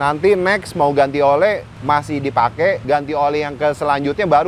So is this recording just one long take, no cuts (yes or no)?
no